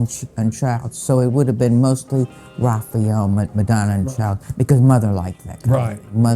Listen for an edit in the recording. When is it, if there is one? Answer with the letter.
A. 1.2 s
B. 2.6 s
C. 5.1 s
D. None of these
D